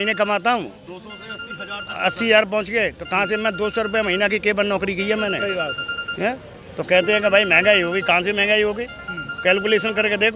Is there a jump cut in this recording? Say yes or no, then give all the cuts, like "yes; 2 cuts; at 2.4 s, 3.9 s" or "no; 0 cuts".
no; 0 cuts